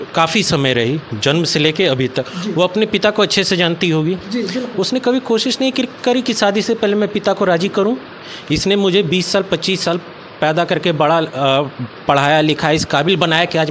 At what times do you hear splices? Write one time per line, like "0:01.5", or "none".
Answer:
none